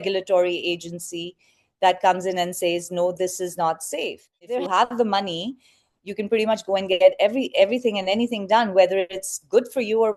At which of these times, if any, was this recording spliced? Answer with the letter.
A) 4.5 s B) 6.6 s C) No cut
A